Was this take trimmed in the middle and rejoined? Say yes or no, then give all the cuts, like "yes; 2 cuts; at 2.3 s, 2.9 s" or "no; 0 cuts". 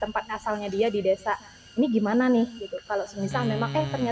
no; 0 cuts